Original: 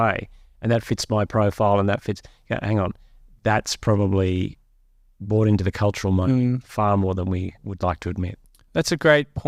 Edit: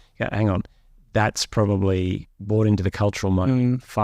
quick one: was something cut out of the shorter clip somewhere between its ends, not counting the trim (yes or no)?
yes